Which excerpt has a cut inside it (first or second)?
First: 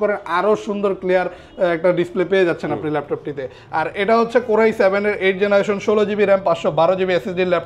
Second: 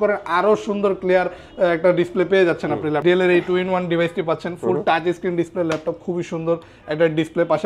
second